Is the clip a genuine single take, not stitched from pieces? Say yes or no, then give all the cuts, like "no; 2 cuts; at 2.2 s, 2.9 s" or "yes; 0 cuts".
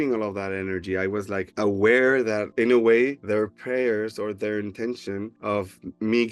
yes; 0 cuts